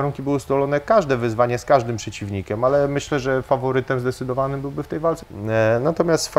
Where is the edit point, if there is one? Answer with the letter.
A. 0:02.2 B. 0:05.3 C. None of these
B